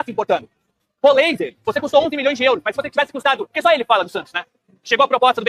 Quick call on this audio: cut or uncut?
cut